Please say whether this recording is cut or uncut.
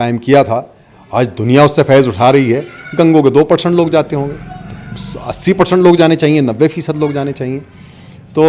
uncut